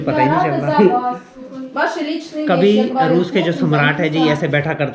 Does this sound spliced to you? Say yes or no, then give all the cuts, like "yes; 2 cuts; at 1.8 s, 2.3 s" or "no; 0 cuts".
no; 0 cuts